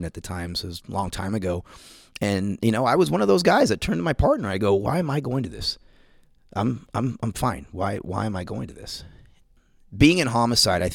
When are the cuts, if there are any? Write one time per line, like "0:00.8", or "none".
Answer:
0:09.3